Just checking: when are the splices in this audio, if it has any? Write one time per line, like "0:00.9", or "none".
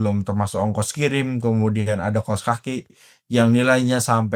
none